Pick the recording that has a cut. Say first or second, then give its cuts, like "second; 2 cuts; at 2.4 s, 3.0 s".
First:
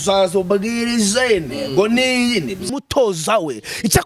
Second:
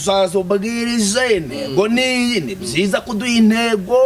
first; 1 cut; at 2.7 s